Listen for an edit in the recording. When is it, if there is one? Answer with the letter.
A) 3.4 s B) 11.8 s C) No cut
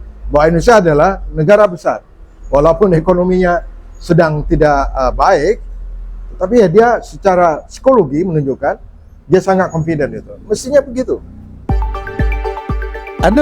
B